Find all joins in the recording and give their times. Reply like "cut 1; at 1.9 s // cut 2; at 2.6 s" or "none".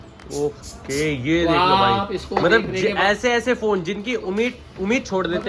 none